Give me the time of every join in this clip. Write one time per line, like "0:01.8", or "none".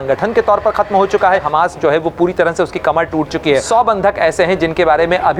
0:01.5
0:03.6